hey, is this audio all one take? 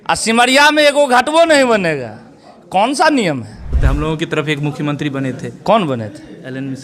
no; 1 cut; at 3.7 s

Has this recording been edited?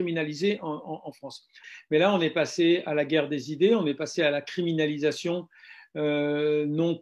yes; 1 cut; at 1.7 s

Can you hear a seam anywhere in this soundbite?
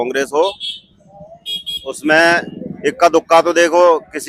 no; 0 cuts

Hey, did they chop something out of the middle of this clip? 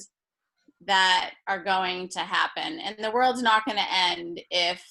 no; 0 cuts

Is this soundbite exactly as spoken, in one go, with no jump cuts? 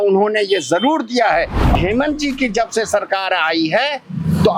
no; 1 cut; at 1.7 s

